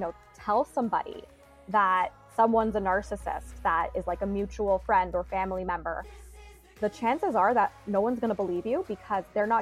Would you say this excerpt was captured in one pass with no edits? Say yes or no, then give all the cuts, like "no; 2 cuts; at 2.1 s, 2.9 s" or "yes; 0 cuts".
yes; 0 cuts